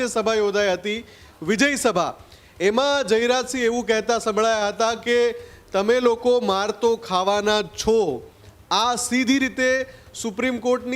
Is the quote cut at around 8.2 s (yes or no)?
no